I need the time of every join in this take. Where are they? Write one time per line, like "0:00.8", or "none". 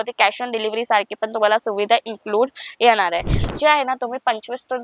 0:03.4